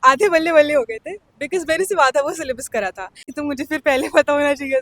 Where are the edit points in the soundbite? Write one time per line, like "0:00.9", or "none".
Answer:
0:03.3